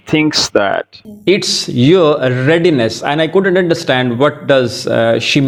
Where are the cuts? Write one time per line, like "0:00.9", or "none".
none